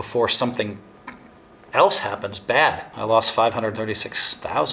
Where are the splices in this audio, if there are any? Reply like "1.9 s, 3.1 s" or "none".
2.9 s